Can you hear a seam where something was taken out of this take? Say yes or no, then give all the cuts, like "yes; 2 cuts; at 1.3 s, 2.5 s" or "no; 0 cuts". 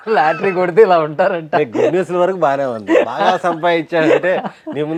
no; 0 cuts